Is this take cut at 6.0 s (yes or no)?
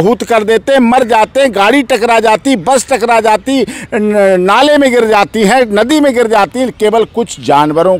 no